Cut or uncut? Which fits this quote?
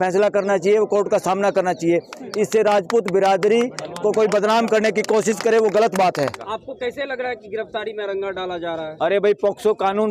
cut